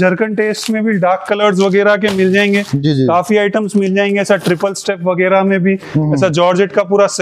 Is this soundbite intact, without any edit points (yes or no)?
yes